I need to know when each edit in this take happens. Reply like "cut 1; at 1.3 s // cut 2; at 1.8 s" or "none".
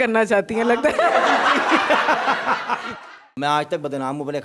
cut 1; at 3.3 s